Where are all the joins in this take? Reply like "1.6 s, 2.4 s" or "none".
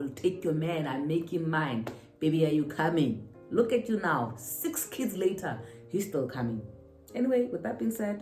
none